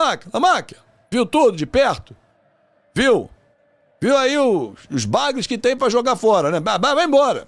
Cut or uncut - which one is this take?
uncut